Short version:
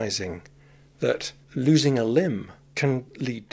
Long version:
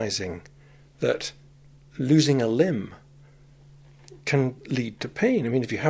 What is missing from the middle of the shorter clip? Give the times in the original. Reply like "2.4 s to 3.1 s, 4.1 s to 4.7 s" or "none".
1.4 s to 1.8 s, 3.0 s to 4.1 s

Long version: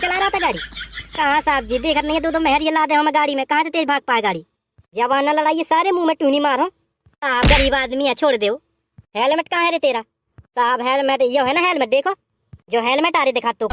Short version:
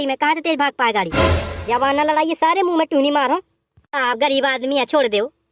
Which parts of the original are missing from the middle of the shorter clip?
none

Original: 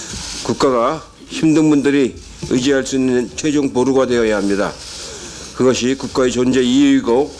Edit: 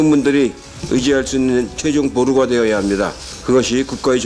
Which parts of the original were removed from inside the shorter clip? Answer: 4.9 s to 5.4 s

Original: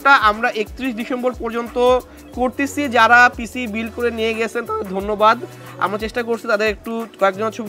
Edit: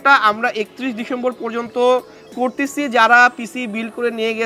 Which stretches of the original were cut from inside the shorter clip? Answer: none

